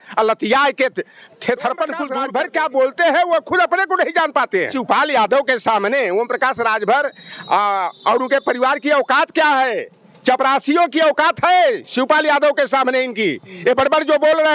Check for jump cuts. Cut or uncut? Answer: cut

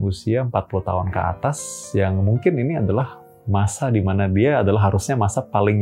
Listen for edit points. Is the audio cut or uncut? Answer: uncut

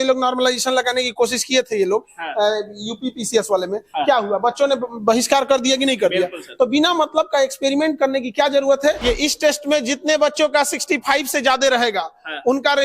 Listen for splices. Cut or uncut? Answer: cut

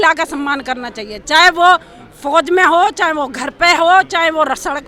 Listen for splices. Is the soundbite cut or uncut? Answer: uncut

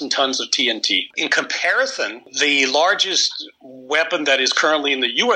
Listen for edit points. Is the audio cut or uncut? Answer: cut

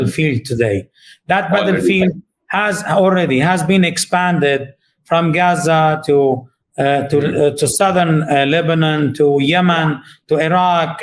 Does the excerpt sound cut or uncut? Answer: uncut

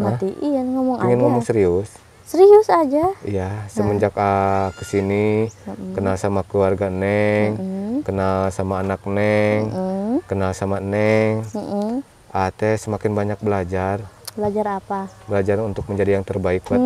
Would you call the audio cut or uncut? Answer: uncut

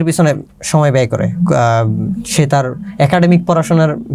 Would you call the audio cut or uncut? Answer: uncut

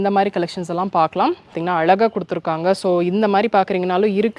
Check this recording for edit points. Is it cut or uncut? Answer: cut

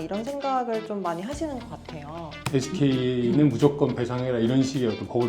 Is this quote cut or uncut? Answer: cut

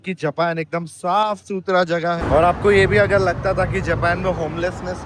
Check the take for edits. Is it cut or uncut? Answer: cut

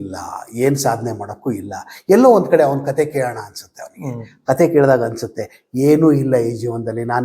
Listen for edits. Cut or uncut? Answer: uncut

